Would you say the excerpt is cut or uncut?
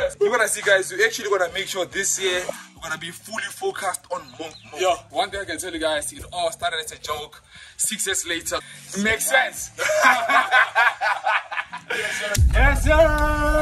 uncut